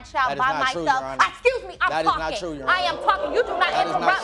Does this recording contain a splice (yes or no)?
no